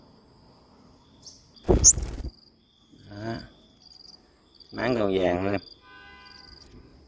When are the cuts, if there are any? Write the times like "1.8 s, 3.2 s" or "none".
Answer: 1.5 s